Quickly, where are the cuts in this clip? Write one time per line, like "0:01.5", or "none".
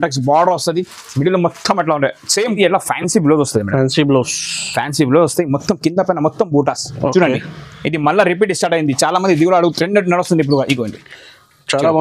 0:02.5